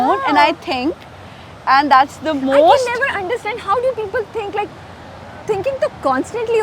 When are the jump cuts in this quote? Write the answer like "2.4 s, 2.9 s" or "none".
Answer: none